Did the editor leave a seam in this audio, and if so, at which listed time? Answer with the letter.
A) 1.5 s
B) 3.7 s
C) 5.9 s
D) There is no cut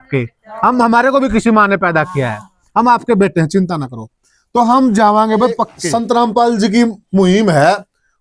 C